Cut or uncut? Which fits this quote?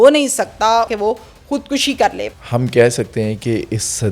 cut